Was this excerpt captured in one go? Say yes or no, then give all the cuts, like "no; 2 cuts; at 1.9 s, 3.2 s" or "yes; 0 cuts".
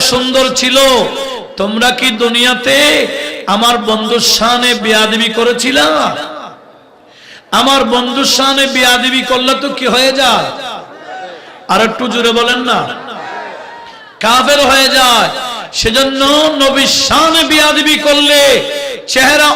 yes; 0 cuts